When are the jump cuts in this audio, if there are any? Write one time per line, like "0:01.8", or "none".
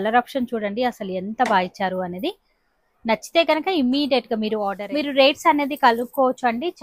0:04.8